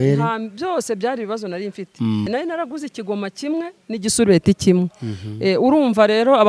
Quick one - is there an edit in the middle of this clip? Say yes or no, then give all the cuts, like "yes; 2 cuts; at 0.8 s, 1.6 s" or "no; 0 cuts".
yes; 1 cut; at 2.3 s